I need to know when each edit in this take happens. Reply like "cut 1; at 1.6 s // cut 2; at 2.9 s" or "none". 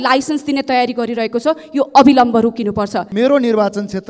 cut 1; at 3.0 s